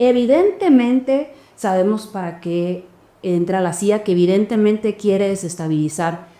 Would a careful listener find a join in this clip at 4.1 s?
no; 0 cuts

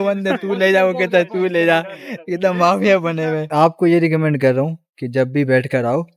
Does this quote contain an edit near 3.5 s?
yes; 1 cut; at 3.5 s

